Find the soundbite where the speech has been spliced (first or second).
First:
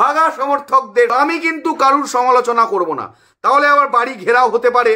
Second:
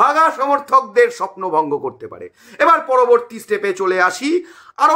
first